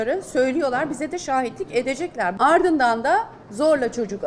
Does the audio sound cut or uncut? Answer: cut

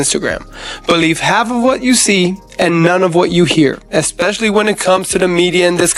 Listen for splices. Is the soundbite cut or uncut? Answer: uncut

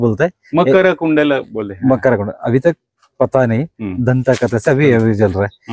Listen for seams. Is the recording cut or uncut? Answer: uncut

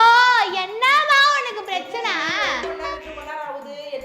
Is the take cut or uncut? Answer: cut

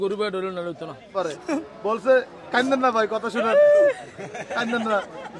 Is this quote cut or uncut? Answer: cut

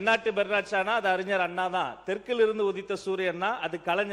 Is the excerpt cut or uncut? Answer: uncut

